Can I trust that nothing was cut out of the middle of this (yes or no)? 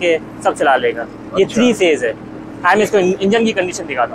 yes